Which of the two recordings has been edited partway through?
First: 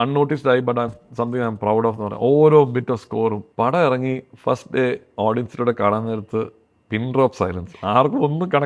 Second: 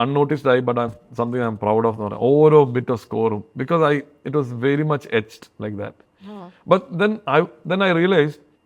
first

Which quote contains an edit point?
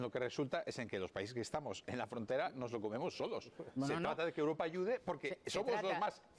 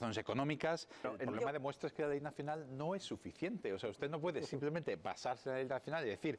second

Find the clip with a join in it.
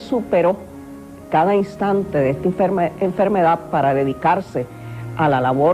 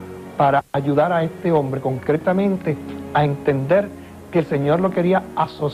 first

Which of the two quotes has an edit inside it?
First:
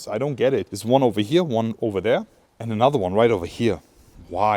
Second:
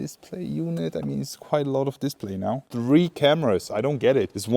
second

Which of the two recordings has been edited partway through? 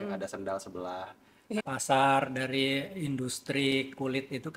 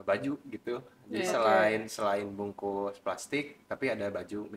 first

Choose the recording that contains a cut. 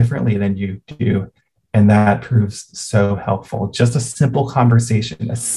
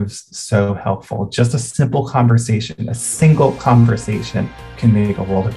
second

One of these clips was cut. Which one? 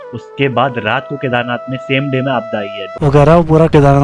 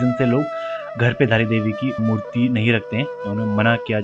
first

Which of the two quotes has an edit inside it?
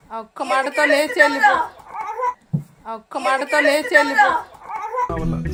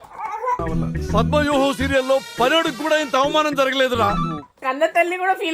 second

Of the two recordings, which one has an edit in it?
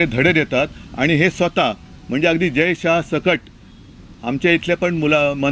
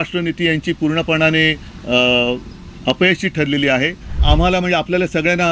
second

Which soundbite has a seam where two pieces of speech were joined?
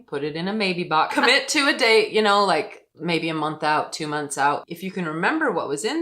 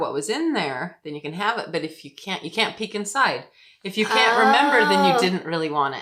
first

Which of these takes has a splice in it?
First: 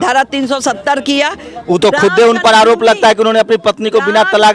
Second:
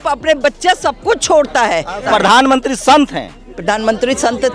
second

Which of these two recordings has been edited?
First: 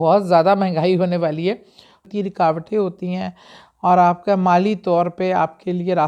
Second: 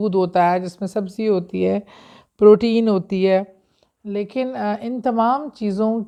first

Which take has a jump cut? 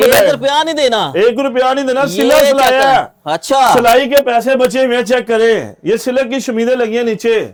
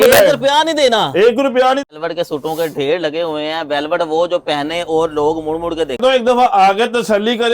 second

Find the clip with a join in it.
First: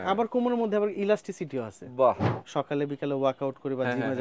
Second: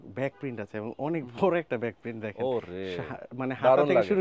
first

